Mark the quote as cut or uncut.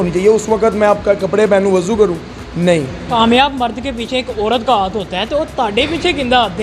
cut